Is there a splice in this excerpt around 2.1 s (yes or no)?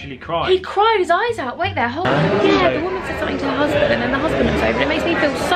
yes